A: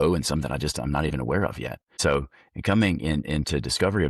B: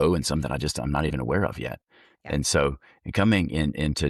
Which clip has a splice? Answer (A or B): A